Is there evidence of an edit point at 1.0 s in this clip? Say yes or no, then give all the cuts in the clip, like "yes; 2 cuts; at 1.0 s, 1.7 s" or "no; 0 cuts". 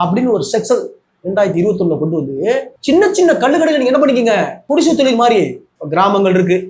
no; 2 cuts; at 2.7 s, 4.6 s